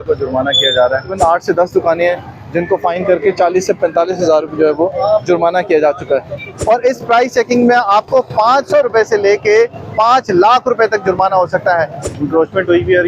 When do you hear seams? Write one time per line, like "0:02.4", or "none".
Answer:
0:01.1
0:06.5
0:12.0